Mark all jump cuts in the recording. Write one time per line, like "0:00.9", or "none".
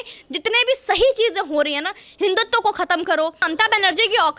0:03.5

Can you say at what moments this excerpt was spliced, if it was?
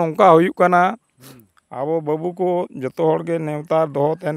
none

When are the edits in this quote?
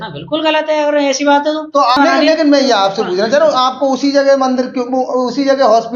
0:02.0

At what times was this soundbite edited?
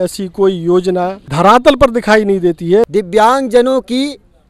0:01.2
0:02.9

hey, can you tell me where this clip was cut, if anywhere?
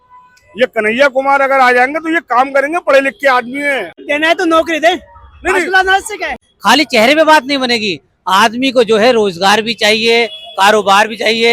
0:04.0
0:06.3

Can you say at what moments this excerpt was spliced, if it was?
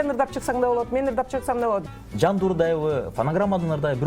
0:01.9

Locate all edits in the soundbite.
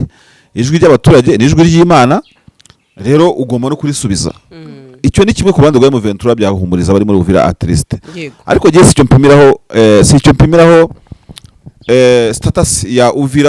none

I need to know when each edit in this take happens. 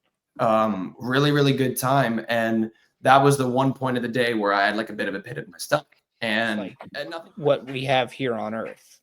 0:06.8

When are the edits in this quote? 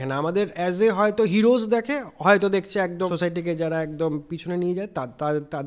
0:03.1

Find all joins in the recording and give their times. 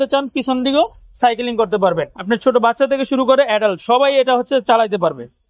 0:02.1

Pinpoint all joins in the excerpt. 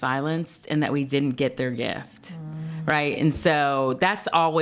none

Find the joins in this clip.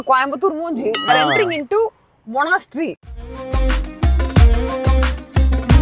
0:01.1
0:03.4

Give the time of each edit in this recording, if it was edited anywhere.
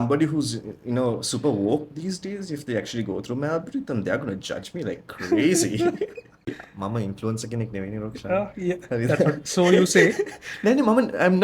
0:06.6

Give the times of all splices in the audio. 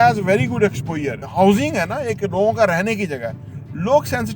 0:01.2

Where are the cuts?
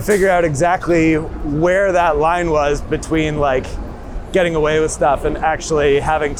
none

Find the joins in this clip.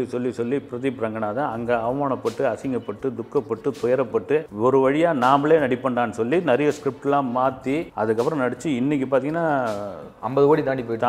none

